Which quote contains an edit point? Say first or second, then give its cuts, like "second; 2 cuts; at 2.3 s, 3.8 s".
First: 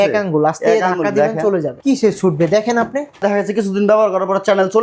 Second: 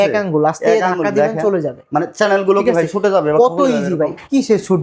first; 2 cuts; at 1.7 s, 3.2 s